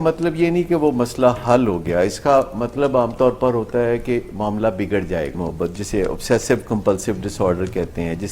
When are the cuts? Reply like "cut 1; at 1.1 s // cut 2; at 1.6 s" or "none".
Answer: cut 1; at 5.3 s

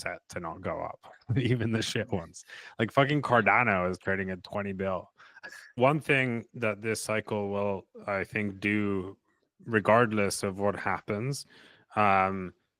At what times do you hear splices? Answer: cut 1; at 5.7 s

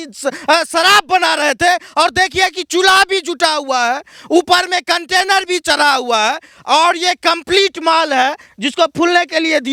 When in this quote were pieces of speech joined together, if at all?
none

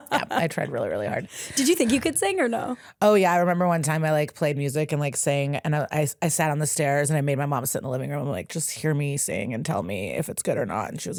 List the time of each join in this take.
none

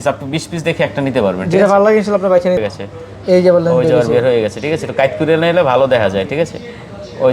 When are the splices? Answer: cut 1; at 2.6 s

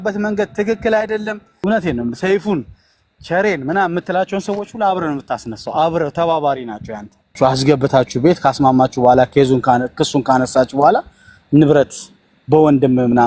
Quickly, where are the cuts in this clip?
cut 1; at 7.4 s

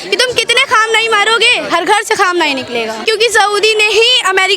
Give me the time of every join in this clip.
cut 1; at 3.0 s

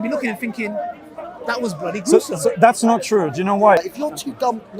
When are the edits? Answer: cut 1; at 3.8 s

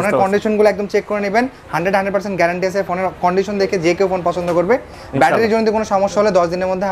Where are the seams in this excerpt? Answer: none

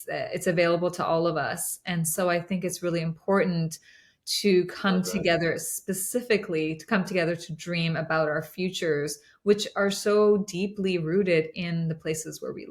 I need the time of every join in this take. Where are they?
none

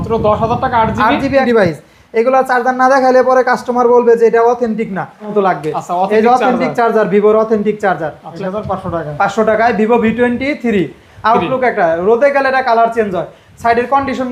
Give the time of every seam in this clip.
cut 1; at 1.4 s // cut 2; at 5.3 s // cut 3; at 8.2 s

